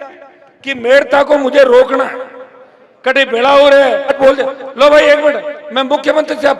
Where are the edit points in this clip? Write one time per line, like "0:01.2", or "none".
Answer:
0:04.1